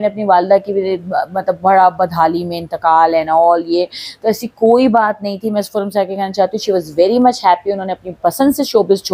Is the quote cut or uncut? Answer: uncut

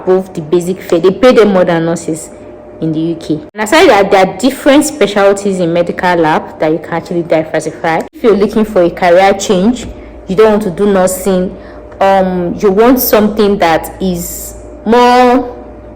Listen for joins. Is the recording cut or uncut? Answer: cut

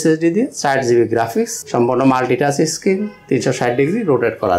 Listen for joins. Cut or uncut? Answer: cut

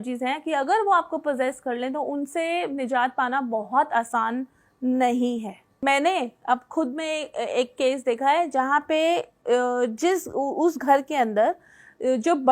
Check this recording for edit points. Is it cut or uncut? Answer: cut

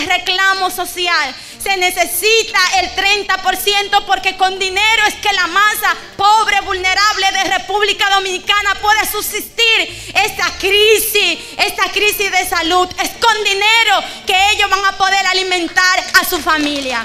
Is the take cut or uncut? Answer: uncut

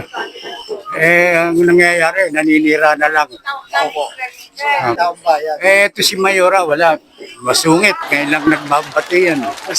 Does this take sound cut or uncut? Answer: cut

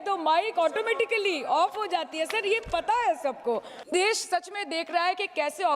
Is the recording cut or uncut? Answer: cut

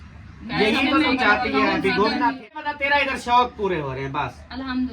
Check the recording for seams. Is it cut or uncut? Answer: cut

